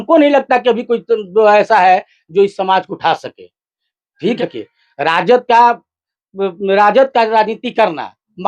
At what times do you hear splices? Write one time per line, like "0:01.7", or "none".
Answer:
0:04.4